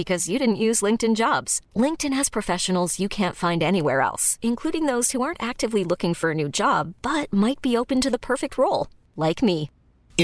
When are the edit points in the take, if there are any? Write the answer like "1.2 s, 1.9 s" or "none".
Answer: none